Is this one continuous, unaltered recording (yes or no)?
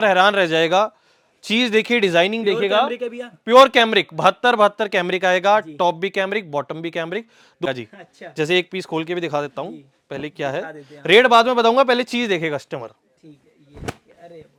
yes